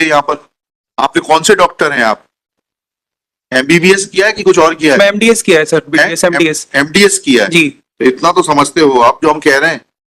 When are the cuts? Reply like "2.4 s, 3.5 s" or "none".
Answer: none